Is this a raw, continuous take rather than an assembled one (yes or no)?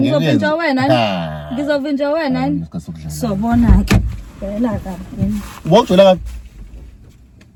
yes